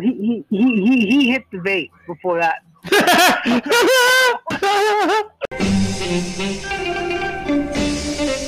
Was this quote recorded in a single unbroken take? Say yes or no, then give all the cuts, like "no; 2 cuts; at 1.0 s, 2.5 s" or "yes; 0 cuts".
no; 1 cut; at 5.4 s